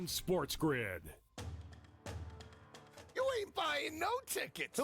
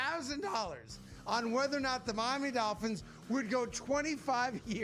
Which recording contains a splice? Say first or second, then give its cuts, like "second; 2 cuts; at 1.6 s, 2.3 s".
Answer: first; 1 cut; at 1.0 s